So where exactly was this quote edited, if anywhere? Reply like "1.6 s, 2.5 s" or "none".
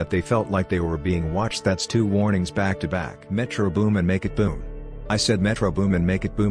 3.2 s

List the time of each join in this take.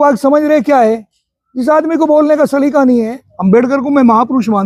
3.2 s

